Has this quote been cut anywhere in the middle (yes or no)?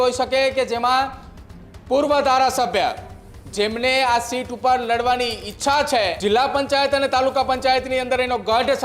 yes